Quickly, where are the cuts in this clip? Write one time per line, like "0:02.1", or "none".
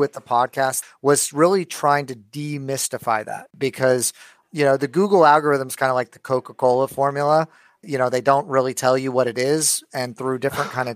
0:00.9
0:03.5